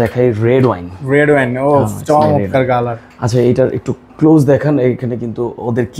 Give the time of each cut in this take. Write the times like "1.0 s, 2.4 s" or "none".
none